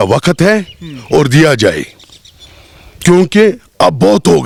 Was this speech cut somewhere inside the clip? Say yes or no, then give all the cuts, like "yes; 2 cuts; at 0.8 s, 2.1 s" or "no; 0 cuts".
no; 0 cuts